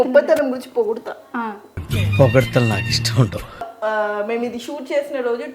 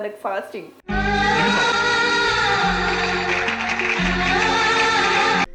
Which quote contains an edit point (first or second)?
first